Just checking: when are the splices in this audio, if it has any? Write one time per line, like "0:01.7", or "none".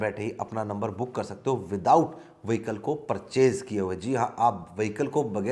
none